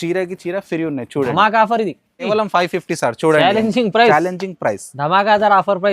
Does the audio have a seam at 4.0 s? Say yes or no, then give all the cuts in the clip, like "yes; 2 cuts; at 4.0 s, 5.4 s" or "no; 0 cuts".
no; 1 cut; at 2.3 s